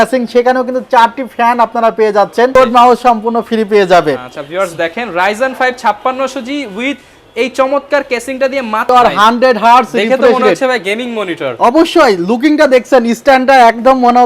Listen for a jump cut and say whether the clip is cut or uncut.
cut